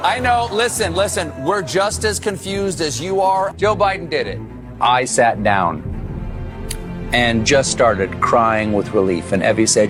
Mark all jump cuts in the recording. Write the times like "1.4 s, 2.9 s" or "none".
none

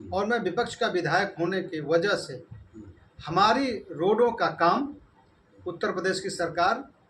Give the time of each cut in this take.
none

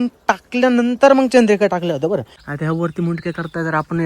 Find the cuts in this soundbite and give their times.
2.4 s

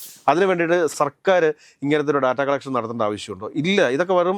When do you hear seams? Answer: 0.9 s

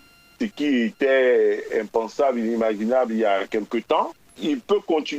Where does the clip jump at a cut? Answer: 4.2 s

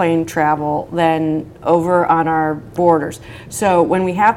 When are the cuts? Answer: 2.7 s

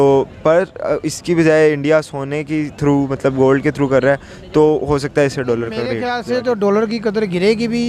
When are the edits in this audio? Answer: 6.1 s

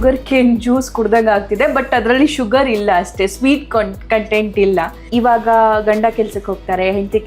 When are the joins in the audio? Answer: 5.0 s

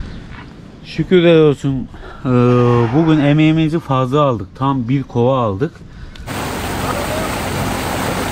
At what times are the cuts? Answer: 6.2 s

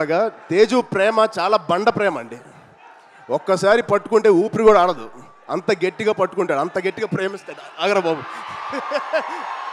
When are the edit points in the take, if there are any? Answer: none

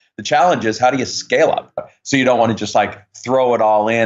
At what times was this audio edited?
1.9 s

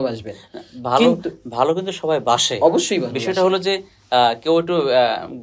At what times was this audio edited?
none

